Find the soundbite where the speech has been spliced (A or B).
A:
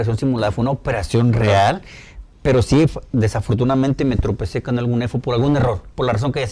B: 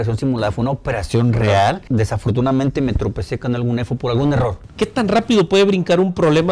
B